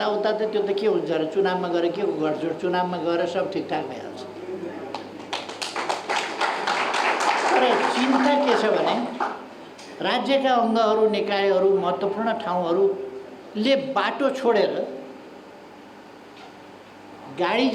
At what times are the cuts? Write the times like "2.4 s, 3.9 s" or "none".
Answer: none